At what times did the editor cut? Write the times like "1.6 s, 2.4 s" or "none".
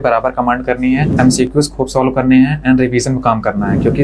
1.1 s